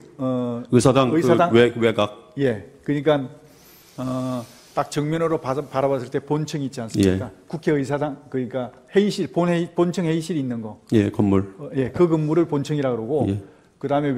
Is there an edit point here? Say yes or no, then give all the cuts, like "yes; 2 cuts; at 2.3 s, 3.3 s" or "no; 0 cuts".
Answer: no; 0 cuts